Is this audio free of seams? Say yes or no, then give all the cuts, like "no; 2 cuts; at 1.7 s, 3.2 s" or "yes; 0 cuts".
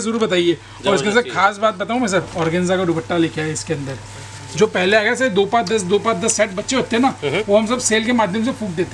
yes; 0 cuts